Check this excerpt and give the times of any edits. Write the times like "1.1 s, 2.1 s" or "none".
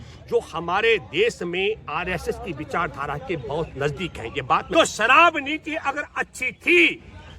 4.7 s